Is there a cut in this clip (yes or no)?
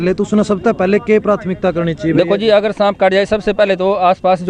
no